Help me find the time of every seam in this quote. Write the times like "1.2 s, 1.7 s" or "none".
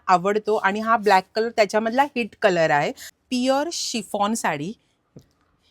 3.0 s